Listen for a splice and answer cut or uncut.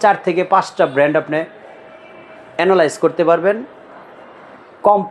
uncut